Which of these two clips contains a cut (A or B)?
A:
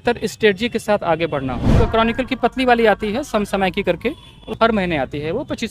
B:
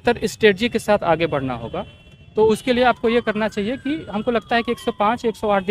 A